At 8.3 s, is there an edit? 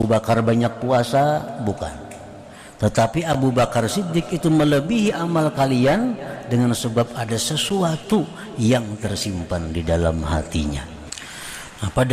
no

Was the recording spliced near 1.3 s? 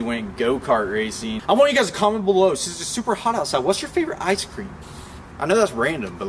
yes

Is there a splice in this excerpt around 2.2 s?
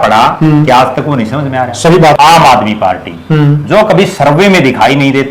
yes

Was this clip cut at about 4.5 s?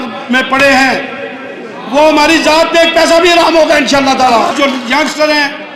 yes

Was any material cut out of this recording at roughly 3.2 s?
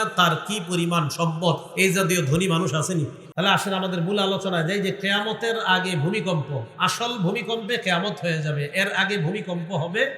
yes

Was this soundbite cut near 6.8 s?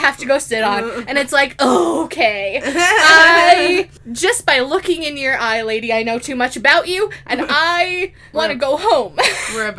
no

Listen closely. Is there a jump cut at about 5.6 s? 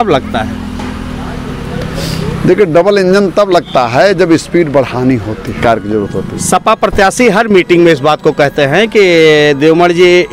yes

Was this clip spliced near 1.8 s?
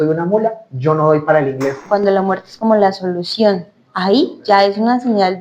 yes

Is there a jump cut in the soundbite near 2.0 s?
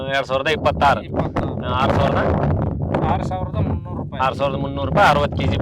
no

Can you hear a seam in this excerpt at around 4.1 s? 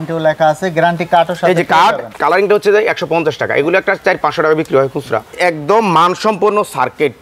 no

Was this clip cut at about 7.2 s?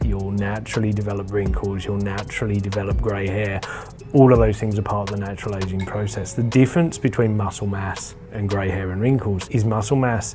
no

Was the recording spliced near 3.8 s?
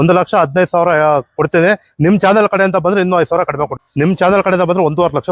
yes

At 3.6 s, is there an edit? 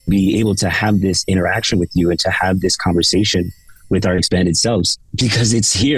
no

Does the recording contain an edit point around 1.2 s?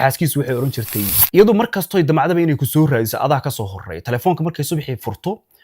yes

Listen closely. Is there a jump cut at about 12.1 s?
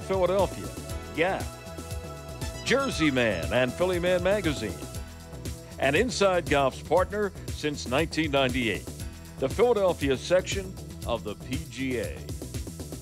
yes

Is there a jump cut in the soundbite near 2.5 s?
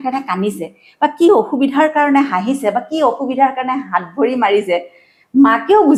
no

